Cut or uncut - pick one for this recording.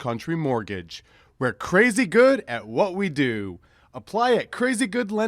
uncut